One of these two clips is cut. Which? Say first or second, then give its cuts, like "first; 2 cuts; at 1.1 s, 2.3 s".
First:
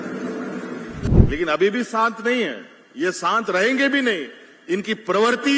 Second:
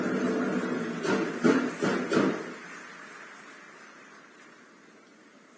first; 1 cut; at 1.0 s